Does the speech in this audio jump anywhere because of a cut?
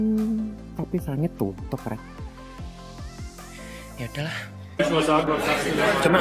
yes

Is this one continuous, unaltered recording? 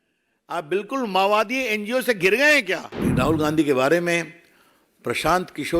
no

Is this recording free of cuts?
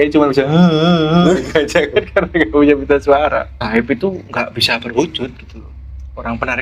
no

